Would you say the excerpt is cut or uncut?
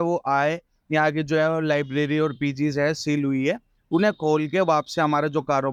uncut